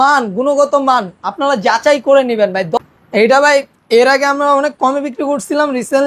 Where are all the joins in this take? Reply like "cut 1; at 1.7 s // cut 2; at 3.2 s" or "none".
cut 1; at 2.8 s